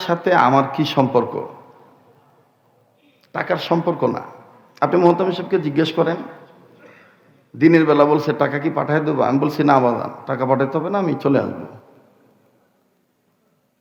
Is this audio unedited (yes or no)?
yes